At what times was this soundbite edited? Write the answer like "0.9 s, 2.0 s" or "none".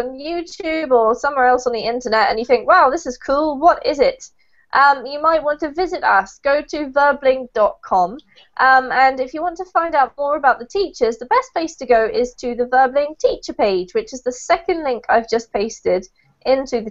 5.6 s